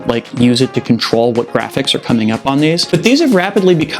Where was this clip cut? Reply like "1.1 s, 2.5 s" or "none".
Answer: 2.8 s